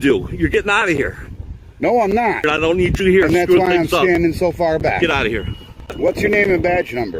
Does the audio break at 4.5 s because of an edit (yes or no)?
no